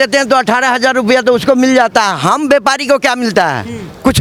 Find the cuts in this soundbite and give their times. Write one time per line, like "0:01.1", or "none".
none